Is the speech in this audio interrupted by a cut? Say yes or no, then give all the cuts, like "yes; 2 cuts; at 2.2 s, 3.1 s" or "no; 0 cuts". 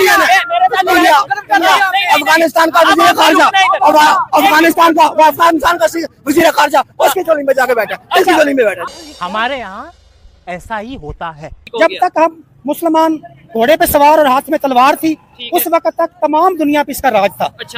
yes; 1 cut; at 11.5 s